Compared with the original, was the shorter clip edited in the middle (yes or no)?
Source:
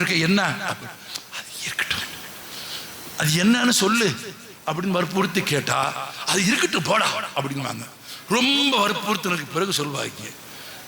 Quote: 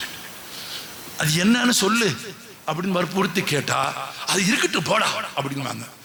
no